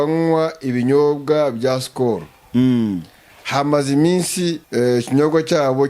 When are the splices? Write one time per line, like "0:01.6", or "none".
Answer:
0:04.6